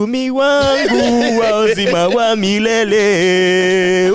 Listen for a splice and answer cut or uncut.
uncut